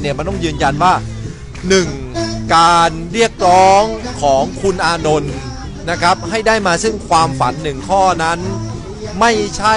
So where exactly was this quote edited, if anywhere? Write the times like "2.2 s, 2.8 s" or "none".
none